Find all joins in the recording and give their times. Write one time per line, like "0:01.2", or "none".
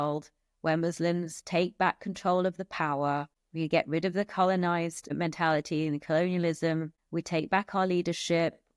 0:03.4
0:05.1
0:07.0